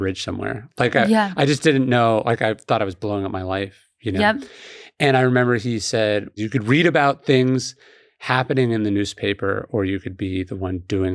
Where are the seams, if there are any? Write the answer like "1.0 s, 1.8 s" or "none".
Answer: 6.3 s